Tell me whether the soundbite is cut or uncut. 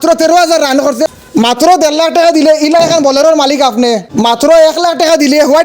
cut